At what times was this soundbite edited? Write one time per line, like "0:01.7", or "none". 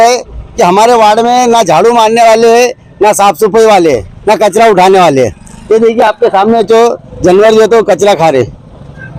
none